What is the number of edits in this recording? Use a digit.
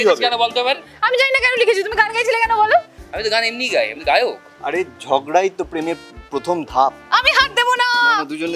2